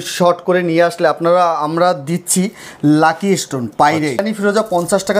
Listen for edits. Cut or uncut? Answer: cut